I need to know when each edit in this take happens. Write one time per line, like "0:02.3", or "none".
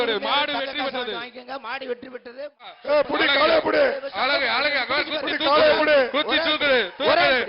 0:02.8